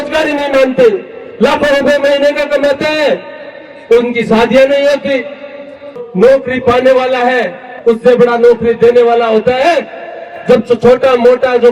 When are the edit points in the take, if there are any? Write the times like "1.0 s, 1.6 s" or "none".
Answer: 6.0 s